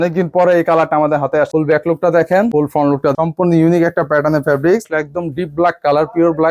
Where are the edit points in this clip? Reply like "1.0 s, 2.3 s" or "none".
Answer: 1.5 s, 3.1 s, 4.8 s